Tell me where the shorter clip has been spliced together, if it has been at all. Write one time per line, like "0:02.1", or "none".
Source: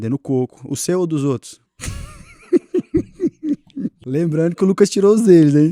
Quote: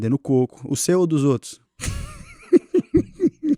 none